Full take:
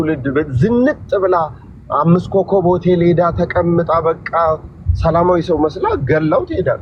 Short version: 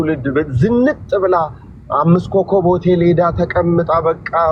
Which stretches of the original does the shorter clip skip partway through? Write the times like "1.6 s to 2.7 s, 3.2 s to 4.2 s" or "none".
none